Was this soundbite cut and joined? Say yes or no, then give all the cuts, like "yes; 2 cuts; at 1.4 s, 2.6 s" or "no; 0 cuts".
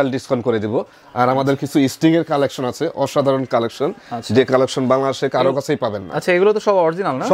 no; 0 cuts